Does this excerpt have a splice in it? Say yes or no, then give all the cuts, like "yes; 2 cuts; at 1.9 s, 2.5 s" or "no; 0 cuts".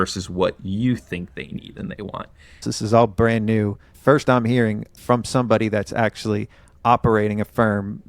yes; 3 cuts; at 2.7 s, 3.9 s, 4.9 s